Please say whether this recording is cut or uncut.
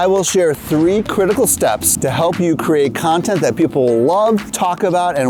uncut